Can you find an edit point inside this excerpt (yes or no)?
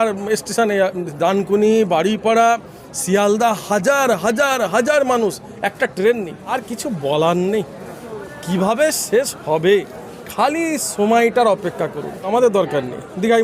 yes